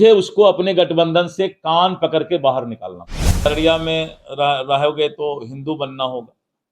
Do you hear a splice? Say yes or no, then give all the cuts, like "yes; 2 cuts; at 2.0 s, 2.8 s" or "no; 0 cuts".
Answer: yes; 1 cut; at 3.5 s